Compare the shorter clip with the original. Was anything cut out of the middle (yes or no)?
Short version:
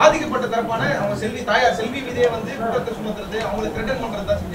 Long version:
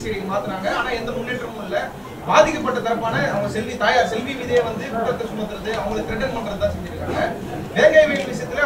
no